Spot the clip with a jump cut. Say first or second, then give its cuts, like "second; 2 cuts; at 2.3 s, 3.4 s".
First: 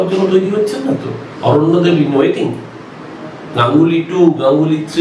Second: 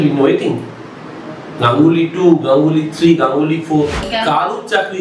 second; 1 cut; at 4.0 s